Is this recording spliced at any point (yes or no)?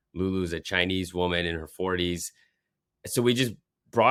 no